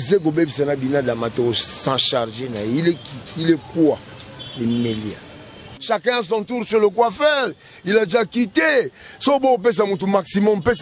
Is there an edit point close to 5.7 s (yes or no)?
yes